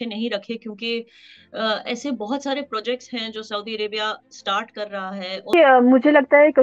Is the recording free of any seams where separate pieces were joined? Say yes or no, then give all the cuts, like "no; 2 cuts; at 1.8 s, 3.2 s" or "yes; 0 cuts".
no; 1 cut; at 5.5 s